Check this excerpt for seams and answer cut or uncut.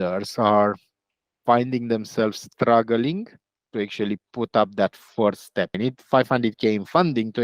cut